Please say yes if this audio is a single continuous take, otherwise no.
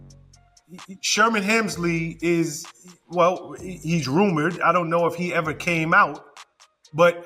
yes